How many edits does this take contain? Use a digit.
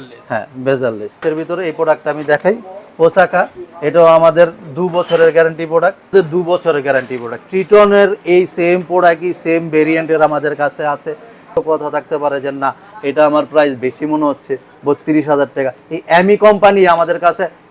3